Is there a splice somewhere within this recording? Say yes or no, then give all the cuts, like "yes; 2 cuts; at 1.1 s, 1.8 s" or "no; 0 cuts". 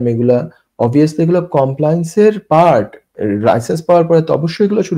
no; 0 cuts